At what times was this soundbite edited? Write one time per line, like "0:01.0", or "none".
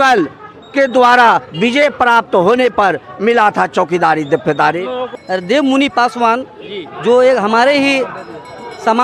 0:05.2

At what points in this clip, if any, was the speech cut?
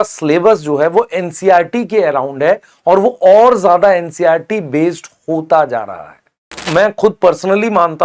0:06.6

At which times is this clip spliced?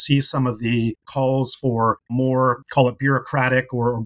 0:01.0

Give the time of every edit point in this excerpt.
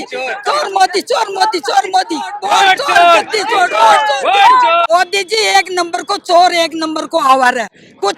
0:02.4
0:04.8

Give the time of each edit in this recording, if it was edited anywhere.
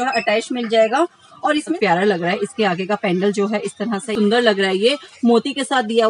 0:01.7
0:04.1

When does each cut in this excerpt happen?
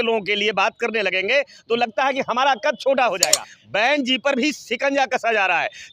0:03.5

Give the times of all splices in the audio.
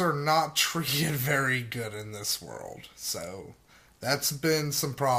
none

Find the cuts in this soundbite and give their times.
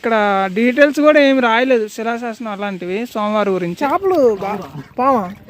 0:03.8

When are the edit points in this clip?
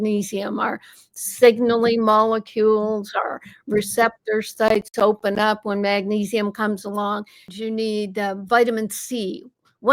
0:07.5

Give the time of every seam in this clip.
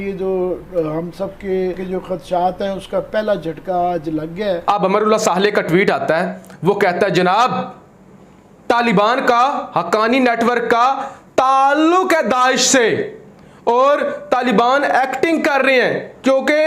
0:01.8
0:04.7

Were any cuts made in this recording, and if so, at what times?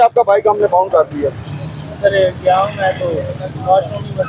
none

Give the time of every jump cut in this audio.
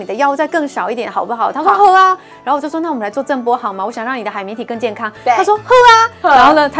none

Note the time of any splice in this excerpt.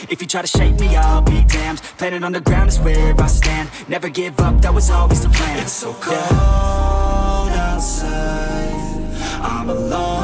none

